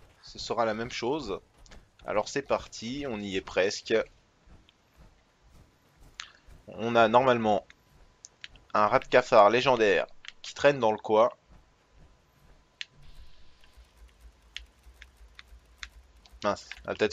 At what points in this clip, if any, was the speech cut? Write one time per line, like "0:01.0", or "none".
0:12.2